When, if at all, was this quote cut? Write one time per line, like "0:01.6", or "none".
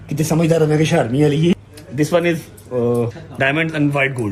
0:01.5
0:03.2